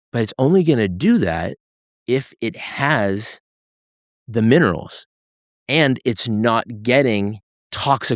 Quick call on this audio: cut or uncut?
uncut